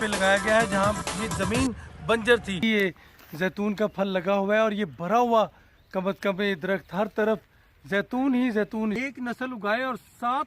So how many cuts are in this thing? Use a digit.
2